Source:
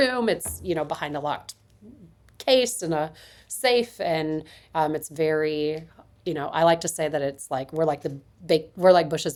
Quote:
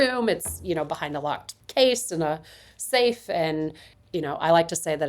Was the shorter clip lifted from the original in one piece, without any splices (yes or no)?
no